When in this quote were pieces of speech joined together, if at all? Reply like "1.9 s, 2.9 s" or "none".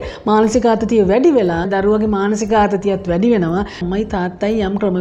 1.7 s, 3.8 s